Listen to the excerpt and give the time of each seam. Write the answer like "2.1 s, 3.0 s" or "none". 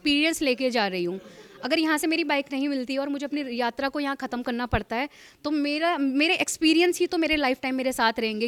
none